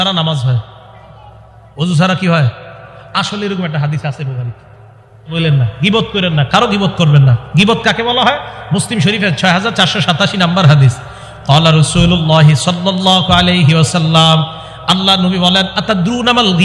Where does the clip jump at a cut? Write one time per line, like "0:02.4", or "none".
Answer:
0:05.3